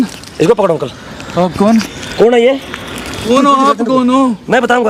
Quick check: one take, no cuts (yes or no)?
no